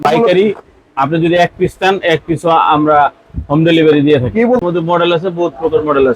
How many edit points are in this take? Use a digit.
1